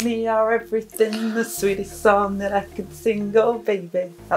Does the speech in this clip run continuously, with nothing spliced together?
yes; 0 cuts

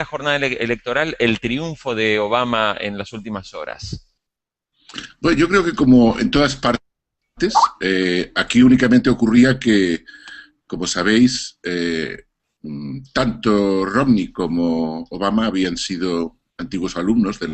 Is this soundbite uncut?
no; 1 cut; at 6.4 s

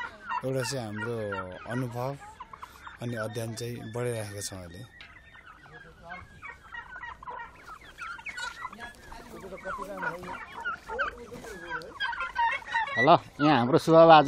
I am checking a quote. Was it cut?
no; 0 cuts

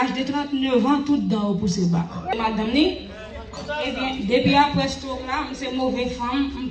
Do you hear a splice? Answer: yes; 1 cut; at 2.3 s

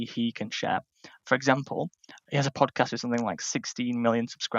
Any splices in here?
no; 0 cuts

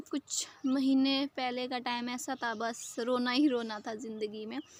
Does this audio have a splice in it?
no; 0 cuts

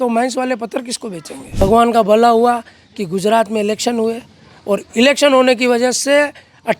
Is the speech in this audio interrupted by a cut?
yes; 1 cut; at 1.6 s

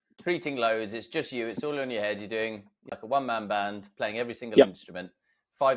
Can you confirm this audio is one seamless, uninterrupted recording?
yes; 0 cuts

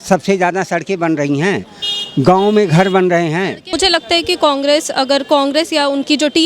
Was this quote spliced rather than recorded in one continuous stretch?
yes; 1 cut; at 3.6 s

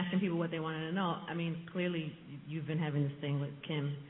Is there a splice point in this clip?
yes; 1 cut; at 1.3 s

